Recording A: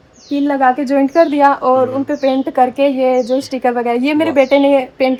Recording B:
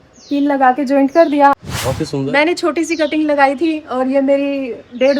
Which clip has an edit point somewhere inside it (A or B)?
B